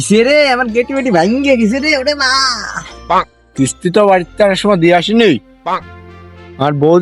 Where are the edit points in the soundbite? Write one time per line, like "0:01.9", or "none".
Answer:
0:03.4